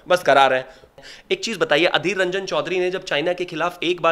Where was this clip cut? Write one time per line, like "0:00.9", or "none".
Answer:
0:01.0